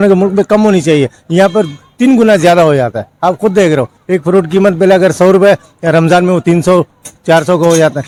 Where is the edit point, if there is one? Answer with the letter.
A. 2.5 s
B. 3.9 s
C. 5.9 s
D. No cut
D